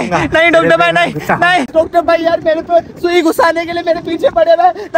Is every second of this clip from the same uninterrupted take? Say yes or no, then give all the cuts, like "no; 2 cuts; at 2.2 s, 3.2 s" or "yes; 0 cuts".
no; 1 cut; at 1.7 s